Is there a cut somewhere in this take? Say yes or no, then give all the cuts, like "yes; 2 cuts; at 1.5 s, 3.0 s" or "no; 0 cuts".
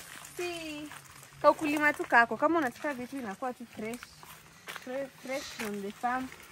no; 0 cuts